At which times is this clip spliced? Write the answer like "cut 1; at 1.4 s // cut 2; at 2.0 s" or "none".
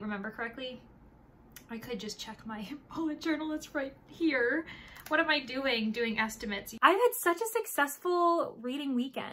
cut 1; at 6.7 s